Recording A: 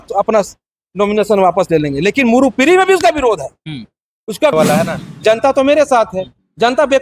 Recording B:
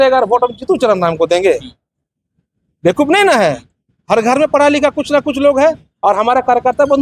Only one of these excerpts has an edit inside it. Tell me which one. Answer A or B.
A